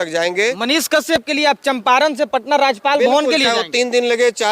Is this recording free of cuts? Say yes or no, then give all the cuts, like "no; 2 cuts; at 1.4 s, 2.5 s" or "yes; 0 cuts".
yes; 0 cuts